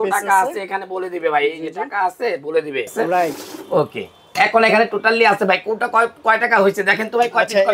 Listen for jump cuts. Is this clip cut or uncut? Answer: cut